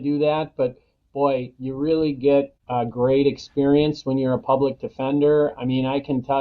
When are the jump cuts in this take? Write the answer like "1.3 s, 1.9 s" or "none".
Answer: 2.6 s